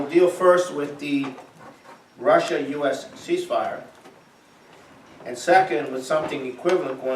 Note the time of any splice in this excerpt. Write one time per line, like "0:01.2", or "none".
0:04.5